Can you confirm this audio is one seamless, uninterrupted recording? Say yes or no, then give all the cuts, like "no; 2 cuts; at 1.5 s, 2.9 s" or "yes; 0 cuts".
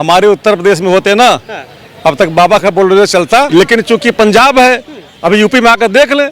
no; 1 cut; at 3.5 s